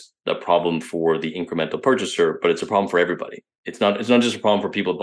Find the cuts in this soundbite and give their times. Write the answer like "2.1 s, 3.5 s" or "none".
none